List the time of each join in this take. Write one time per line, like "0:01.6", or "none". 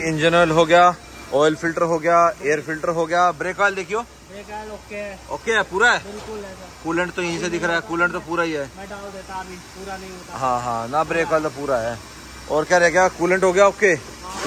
none